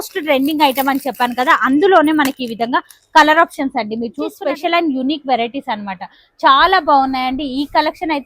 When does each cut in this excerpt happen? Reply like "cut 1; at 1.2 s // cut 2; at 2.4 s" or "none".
cut 1; at 4.4 s